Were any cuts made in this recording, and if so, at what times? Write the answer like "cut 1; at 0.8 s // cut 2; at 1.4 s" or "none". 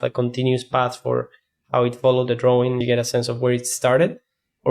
cut 1; at 2.8 s